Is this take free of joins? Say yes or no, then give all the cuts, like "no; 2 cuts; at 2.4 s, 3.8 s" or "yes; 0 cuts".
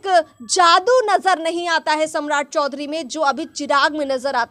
yes; 0 cuts